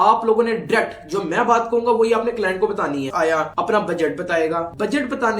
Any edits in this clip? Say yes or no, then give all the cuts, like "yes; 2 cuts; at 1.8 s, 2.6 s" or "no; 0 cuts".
yes; 1 cut; at 3.1 s